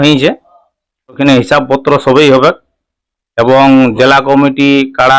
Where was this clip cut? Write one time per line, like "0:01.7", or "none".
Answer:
0:01.2

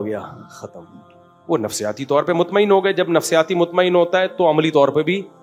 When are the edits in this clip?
none

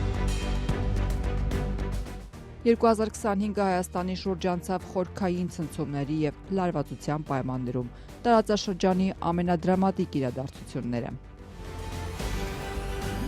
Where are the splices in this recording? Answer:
0:02.0

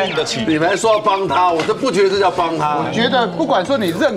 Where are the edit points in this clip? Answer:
0:02.9

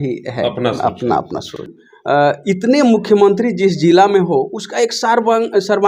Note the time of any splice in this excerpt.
0:01.7

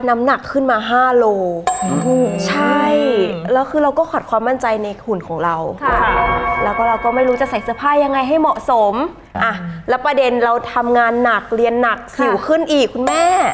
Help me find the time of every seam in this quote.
none

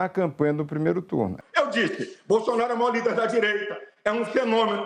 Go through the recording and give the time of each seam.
0:01.4

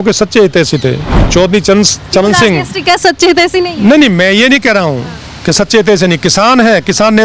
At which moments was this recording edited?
none

